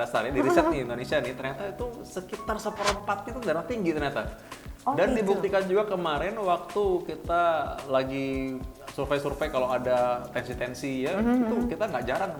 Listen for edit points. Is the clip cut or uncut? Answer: uncut